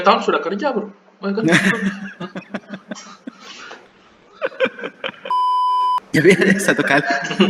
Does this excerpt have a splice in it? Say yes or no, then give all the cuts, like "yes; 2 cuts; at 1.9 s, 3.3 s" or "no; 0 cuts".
yes; 1 cut; at 5.5 s